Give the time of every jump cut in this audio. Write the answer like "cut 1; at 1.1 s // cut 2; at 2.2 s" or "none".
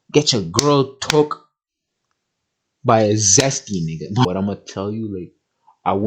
cut 1; at 4.2 s

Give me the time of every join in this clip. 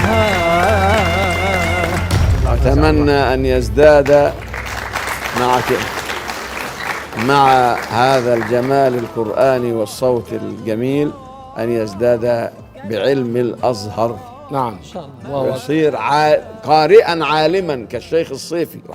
cut 1; at 2.3 s

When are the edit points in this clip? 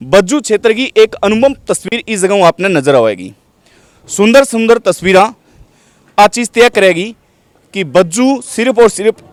none

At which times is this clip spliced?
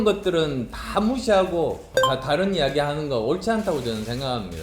cut 1; at 2.1 s

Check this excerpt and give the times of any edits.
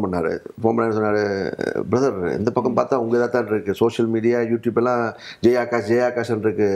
none

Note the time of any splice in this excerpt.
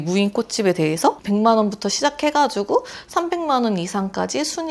cut 1; at 1.2 s

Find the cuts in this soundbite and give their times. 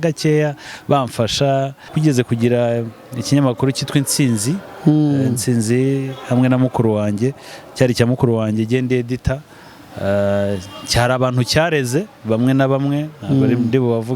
cut 1; at 1.9 s

